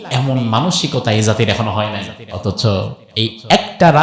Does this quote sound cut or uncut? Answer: cut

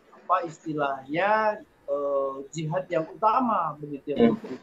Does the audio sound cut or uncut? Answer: uncut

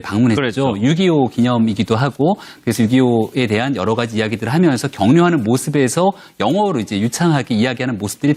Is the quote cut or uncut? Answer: uncut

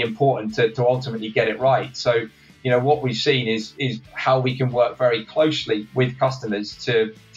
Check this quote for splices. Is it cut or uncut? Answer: uncut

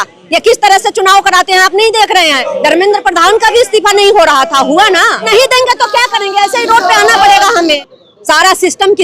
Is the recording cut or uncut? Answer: cut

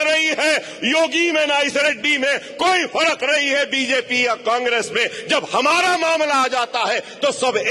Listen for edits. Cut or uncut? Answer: uncut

